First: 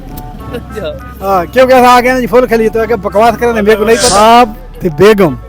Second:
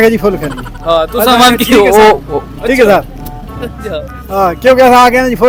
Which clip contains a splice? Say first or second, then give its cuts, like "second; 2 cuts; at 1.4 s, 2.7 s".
first; 1 cut; at 4.1 s